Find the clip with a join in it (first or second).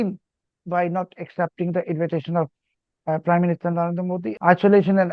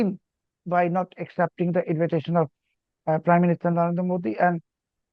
first